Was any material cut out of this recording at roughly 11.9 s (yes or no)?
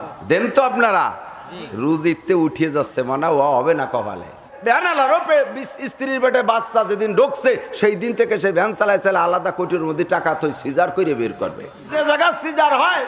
yes